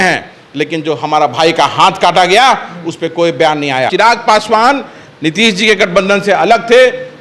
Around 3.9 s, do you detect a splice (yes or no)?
yes